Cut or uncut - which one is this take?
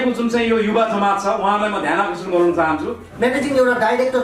cut